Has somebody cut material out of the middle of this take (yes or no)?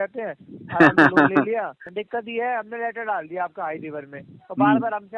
yes